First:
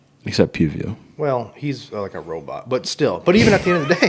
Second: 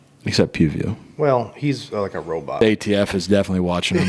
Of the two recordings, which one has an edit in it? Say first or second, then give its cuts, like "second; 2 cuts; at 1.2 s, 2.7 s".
second; 1 cut; at 2.6 s